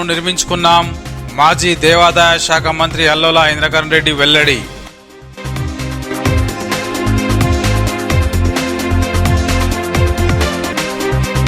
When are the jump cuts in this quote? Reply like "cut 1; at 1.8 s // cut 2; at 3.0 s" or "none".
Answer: none